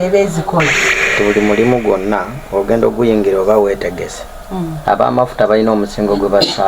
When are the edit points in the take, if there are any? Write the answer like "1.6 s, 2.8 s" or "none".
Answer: 1.1 s